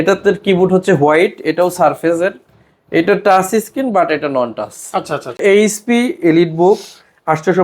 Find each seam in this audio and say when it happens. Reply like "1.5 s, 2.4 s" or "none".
5.4 s